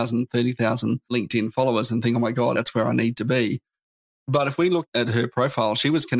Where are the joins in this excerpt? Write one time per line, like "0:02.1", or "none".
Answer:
0:01.1
0:02.5
0:04.9